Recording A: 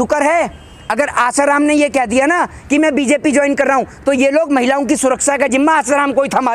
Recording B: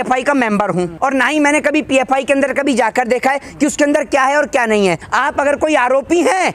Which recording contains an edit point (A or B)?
B